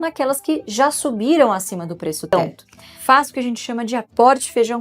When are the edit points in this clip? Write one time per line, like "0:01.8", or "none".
0:02.3